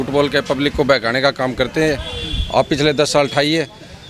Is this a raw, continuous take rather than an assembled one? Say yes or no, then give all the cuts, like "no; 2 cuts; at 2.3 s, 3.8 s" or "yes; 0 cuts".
yes; 0 cuts